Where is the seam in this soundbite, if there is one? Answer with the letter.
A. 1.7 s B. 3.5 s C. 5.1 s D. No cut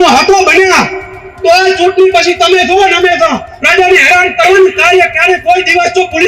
B